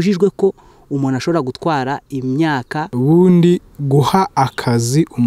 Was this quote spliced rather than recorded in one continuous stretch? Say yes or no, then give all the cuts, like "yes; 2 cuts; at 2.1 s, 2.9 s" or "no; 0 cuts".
yes; 1 cut; at 2.9 s